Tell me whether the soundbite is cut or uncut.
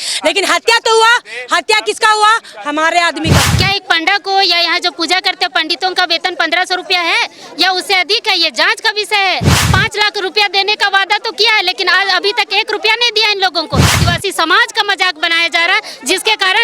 cut